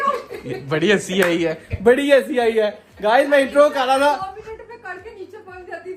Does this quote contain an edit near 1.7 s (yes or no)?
no